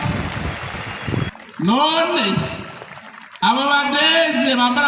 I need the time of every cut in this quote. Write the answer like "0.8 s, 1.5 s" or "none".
1.3 s